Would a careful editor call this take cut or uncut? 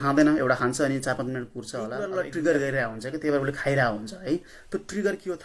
cut